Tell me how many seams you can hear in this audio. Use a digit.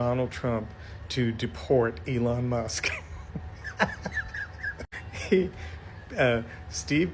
0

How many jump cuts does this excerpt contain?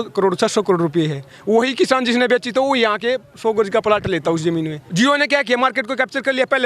1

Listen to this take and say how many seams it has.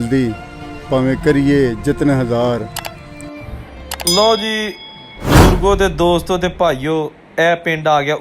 0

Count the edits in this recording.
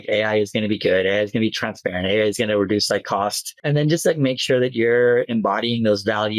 1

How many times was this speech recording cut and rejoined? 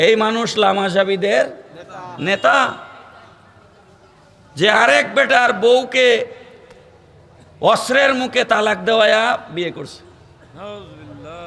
0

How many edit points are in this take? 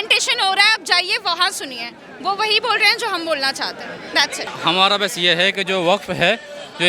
1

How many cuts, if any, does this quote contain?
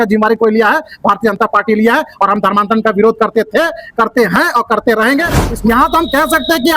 1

